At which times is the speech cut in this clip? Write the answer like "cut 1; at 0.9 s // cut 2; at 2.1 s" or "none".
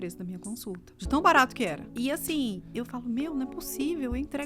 cut 1; at 0.9 s // cut 2; at 1.8 s

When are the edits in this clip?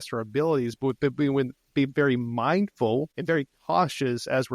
cut 1; at 3.1 s

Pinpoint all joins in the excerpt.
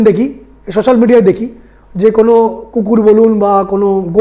none

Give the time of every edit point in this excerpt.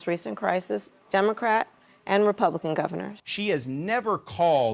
cut 1; at 3.2 s

